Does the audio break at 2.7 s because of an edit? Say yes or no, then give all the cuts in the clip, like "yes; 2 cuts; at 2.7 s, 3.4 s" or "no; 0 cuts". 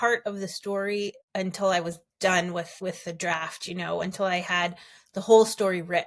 yes; 2 cuts; at 1.2 s, 2.7 s